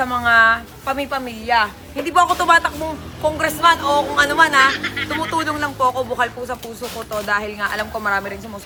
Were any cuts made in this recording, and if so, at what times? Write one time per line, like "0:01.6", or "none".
none